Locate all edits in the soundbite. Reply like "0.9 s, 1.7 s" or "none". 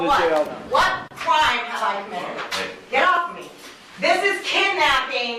none